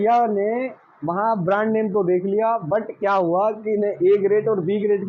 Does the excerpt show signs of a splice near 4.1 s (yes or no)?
no